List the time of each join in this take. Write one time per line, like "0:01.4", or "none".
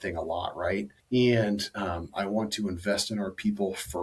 0:01.0